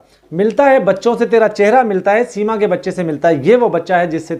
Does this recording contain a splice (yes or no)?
no